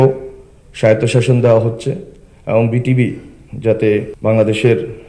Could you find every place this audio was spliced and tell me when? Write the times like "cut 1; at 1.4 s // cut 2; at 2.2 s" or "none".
cut 1; at 4.1 s